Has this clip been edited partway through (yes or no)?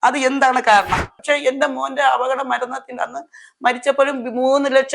yes